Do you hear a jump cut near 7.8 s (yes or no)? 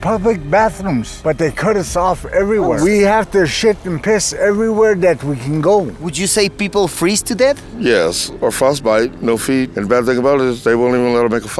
no